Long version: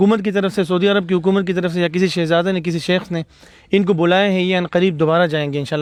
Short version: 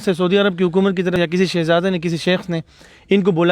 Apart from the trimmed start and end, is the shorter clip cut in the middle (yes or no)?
yes